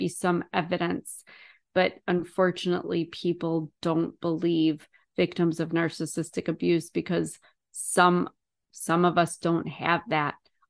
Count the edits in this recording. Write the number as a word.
zero